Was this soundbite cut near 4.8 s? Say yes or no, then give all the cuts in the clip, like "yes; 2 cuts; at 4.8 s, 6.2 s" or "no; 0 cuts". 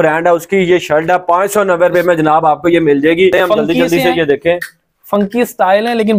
no; 1 cut; at 3.3 s